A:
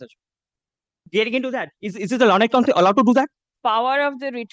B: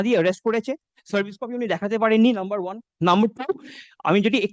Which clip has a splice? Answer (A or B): A